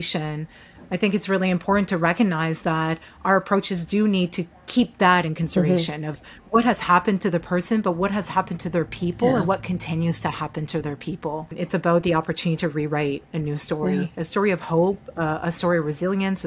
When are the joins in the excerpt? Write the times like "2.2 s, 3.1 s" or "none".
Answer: 11.5 s